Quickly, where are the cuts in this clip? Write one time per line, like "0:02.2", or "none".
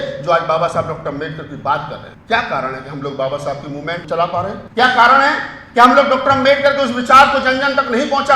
0:02.1
0:04.1